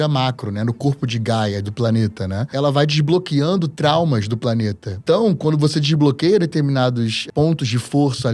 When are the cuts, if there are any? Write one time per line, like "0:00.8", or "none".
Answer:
0:02.5
0:04.9
0:07.2